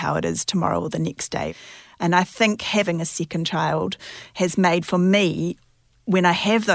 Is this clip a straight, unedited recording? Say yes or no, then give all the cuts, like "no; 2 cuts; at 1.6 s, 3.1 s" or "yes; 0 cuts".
no; 2 cuts; at 1.5 s, 2.9 s